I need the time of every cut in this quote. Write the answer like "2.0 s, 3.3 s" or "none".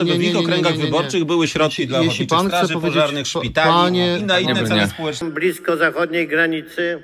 5.2 s